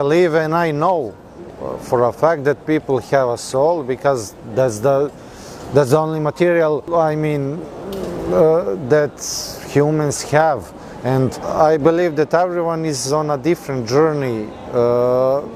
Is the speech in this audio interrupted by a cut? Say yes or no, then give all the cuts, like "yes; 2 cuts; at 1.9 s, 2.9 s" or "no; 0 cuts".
no; 0 cuts